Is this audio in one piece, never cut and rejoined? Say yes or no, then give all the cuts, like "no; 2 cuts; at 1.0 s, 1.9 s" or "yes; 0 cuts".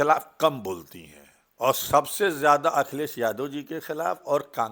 yes; 0 cuts